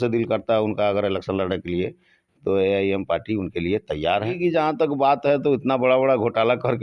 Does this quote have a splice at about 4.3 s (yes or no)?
yes